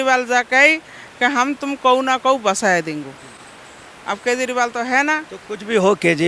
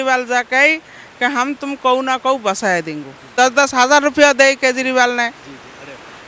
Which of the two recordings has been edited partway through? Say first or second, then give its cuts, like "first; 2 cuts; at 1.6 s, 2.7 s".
second; 1 cut; at 3.3 s